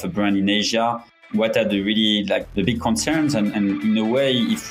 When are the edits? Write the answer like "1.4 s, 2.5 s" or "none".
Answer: 1.1 s, 2.5 s, 3.5 s